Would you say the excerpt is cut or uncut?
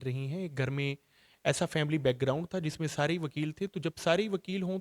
uncut